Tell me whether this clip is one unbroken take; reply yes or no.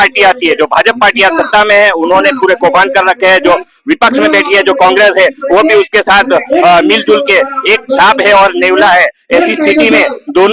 yes